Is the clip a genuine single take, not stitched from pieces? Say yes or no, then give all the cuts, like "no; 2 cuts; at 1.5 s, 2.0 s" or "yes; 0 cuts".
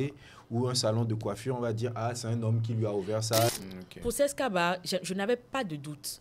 no; 1 cut; at 3.5 s